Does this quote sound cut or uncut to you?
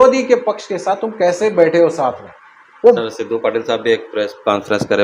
cut